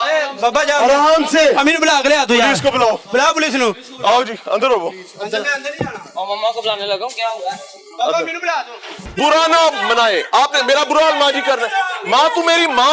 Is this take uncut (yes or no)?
yes